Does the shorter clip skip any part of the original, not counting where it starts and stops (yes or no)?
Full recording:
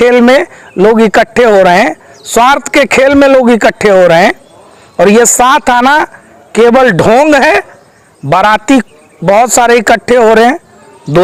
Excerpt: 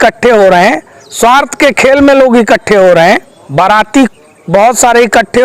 yes